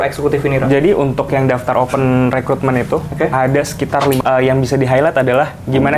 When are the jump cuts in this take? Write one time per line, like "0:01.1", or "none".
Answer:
0:04.2